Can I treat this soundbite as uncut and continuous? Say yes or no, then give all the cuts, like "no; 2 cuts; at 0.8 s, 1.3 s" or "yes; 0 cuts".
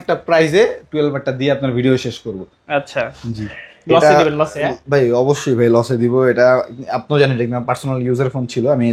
yes; 0 cuts